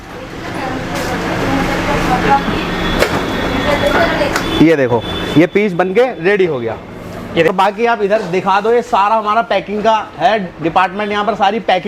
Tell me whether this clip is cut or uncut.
cut